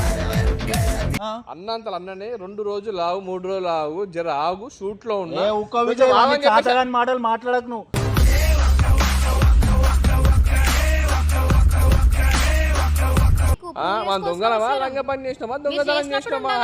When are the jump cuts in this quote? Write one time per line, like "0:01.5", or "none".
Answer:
0:01.2
0:13.5